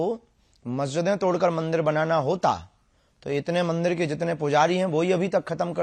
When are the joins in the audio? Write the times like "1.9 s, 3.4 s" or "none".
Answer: none

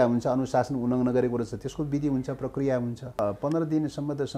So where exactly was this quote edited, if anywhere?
3.2 s

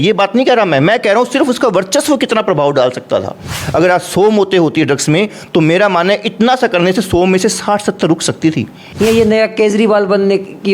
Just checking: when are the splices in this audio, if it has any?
3.6 s, 8.8 s

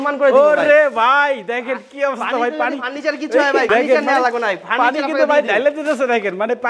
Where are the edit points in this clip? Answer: none

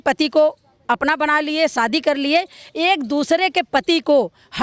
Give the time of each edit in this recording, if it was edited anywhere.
none

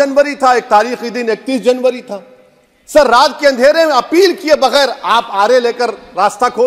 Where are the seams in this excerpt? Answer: none

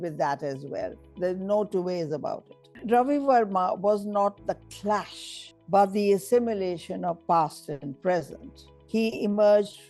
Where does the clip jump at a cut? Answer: 2.8 s

